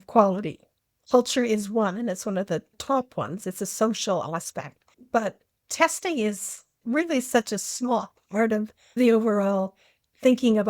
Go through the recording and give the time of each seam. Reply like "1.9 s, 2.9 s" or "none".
5.5 s, 9.0 s